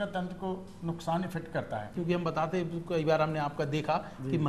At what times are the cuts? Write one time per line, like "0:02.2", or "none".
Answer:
0:01.9